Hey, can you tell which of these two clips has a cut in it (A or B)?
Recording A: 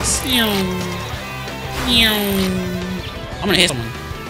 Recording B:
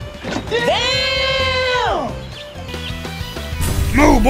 B